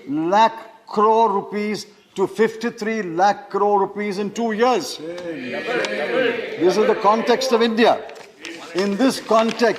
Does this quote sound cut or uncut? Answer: uncut